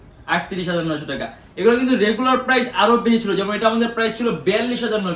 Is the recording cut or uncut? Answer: uncut